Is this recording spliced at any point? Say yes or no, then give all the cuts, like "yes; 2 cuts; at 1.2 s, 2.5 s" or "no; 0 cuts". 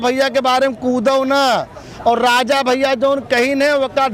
no; 0 cuts